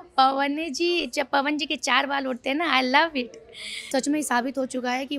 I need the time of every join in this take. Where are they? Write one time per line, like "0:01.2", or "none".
0:03.9

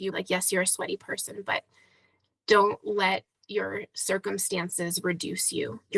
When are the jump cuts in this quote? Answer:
none

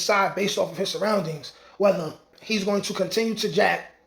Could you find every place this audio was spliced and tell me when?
0:02.4

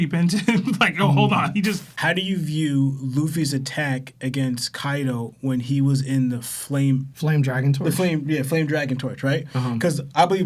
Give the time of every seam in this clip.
0:01.9
0:07.1

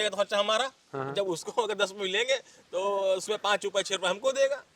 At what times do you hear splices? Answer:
none

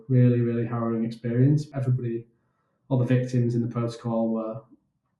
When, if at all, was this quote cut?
0:01.7

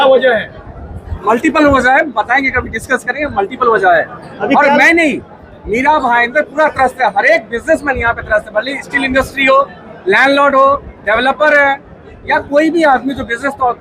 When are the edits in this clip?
none

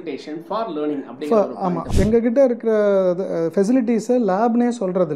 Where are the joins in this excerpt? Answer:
0:01.8

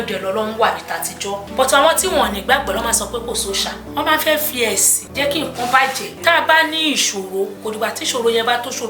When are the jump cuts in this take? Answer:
0:01.4
0:03.8
0:05.0
0:06.1
0:07.6

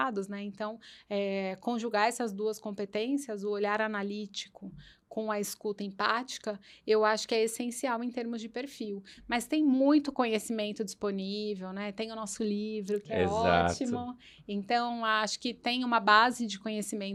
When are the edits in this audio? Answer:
none

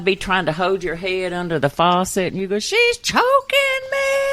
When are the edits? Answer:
none

